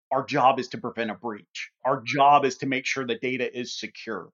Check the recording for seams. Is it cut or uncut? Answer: cut